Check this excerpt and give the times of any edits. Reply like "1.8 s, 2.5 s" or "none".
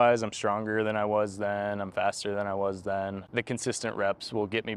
3.2 s